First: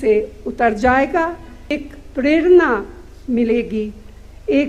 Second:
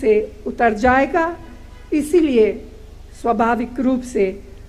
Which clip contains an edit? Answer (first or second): first